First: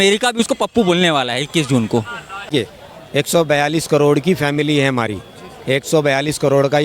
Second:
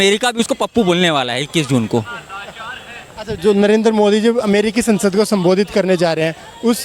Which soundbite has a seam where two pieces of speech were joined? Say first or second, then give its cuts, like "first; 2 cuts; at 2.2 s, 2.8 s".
first; 1 cut; at 2.5 s